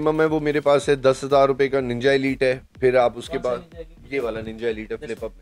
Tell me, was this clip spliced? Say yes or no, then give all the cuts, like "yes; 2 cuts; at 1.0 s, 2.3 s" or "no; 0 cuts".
no; 0 cuts